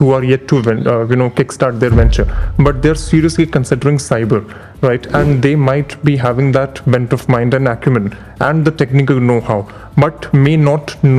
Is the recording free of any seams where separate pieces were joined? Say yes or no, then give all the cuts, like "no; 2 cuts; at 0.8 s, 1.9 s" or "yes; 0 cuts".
yes; 0 cuts